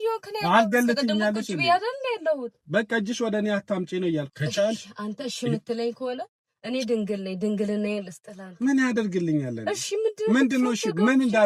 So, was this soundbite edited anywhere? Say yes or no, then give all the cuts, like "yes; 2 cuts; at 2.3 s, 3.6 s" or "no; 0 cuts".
yes; 1 cut; at 4.3 s